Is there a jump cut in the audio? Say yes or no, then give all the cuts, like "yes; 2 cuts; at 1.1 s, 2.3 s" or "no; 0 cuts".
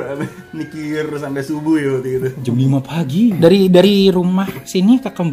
yes; 1 cut; at 3.4 s